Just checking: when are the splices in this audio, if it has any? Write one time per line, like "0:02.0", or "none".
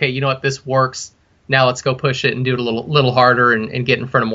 none